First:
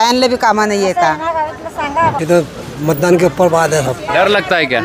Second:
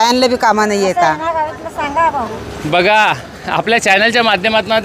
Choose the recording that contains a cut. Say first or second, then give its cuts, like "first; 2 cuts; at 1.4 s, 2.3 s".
first; 1 cut; at 2.2 s